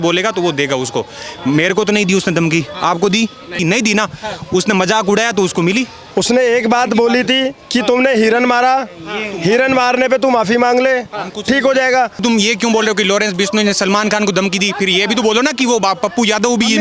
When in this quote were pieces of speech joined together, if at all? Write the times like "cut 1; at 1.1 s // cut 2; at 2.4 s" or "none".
cut 1; at 3.6 s // cut 2; at 6.0 s // cut 3; at 12.2 s